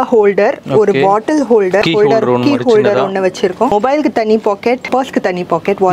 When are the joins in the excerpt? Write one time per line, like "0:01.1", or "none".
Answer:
0:01.8
0:03.7
0:04.9

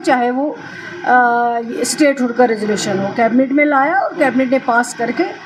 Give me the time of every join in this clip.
none

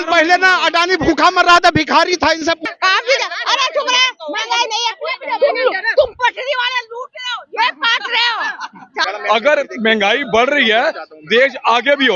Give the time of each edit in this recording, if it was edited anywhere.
0:02.6
0:09.0

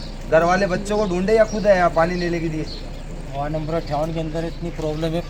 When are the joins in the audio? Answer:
none

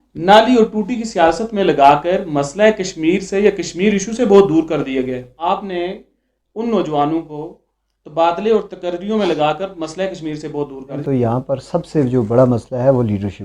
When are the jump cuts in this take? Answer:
0:05.3
0:11.0

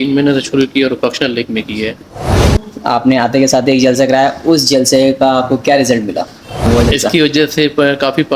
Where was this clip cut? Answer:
0:02.3
0:06.7

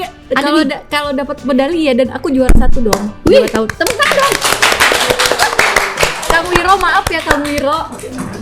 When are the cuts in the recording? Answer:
none

